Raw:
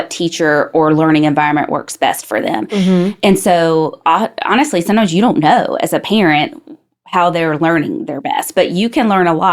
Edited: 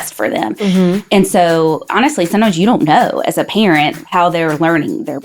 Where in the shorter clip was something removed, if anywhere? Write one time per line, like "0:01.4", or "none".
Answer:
0:01.8
0:04.0